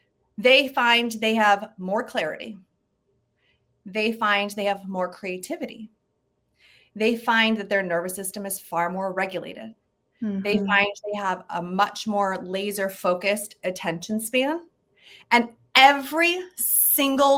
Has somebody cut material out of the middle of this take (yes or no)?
no